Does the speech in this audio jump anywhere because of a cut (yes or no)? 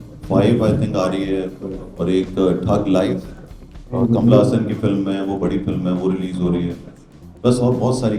no